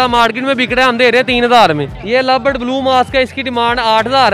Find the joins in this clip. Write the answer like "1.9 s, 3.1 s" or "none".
1.9 s